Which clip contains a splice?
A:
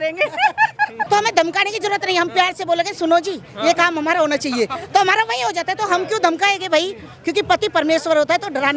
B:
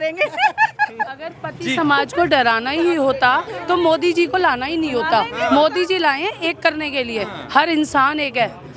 A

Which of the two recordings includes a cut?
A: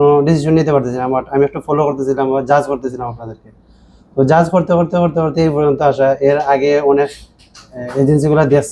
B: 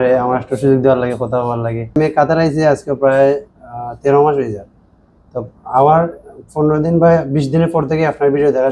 B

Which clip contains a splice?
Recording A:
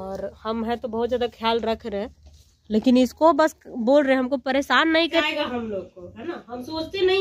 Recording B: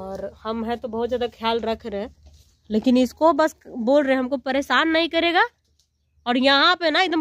A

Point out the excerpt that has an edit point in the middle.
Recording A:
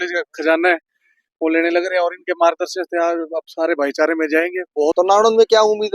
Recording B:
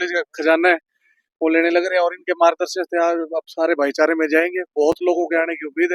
A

